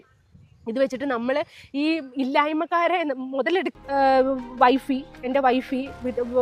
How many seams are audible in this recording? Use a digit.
1